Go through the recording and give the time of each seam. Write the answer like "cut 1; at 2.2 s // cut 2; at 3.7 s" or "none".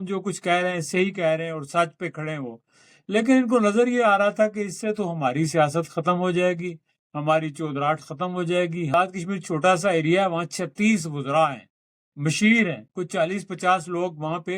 cut 1; at 8.9 s